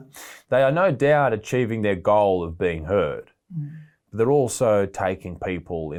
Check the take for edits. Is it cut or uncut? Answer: uncut